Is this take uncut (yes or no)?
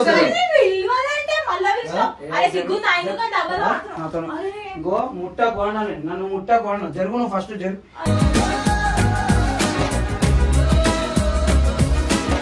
yes